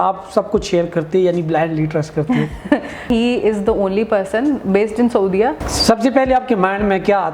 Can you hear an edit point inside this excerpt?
yes; 2 cuts; at 3.1 s, 5.6 s

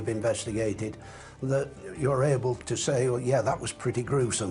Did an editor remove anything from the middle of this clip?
yes; 2 cuts; at 1.8 s, 2.6 s

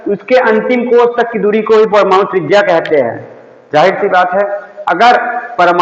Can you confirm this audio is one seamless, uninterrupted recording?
yes; 0 cuts

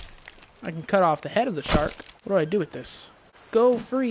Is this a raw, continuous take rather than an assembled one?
no; 1 cut; at 2.1 s

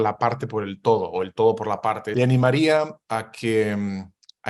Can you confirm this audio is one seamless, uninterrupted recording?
no; 1 cut; at 2.0 s

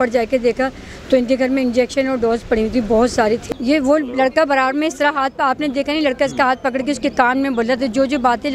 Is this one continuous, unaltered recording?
no; 1 cut; at 3.4 s

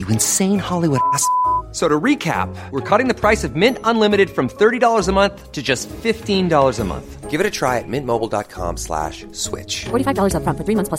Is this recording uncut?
yes; 0 cuts

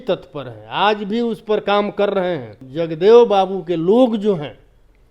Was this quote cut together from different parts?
yes; 1 cut; at 2.6 s

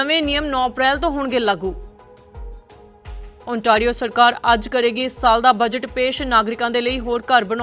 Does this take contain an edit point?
no; 0 cuts

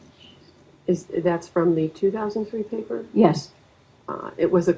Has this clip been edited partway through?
no; 0 cuts

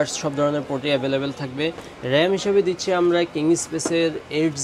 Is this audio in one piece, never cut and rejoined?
yes; 0 cuts

